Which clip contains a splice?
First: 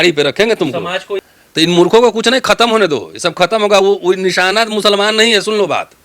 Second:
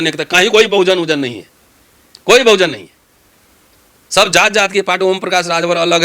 first; 1 cut; at 1.2 s

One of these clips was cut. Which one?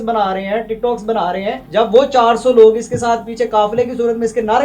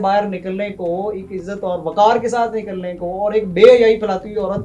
first; 1 cut; at 1.6 s

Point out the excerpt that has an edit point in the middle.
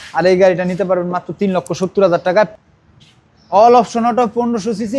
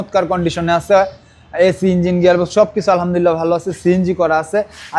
first; 1 cut; at 2.5 s

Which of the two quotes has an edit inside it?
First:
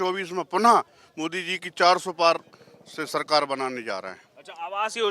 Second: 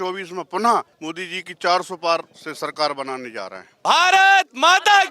second; 3 cuts; at 1.0 s, 2.4 s, 3.7 s

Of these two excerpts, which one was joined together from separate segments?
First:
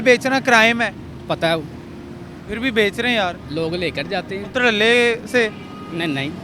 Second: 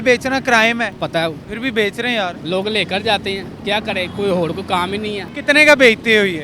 second; 3 cuts; at 1.1 s, 2.4 s, 5.2 s

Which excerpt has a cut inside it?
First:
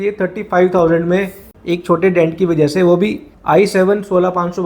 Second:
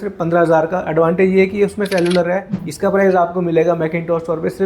second; 1 cut; at 2.5 s

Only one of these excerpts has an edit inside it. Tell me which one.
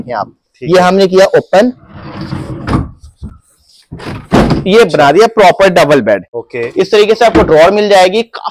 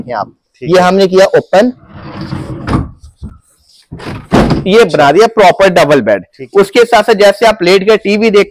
first; 1 cut; at 6.3 s

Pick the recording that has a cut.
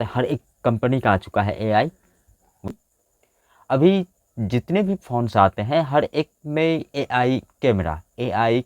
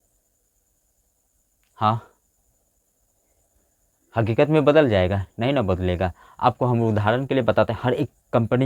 first; 1 cut; at 2.7 s

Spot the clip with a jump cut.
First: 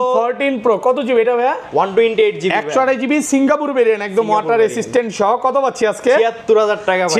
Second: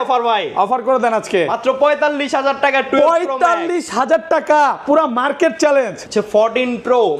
second; 1 cut; at 6.0 s

